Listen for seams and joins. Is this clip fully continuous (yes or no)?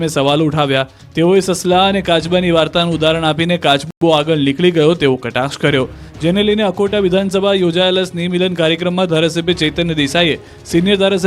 yes